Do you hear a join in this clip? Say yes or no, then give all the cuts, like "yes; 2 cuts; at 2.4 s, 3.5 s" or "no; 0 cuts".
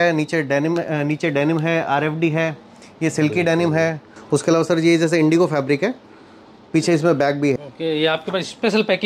yes; 2 cuts; at 4.1 s, 7.6 s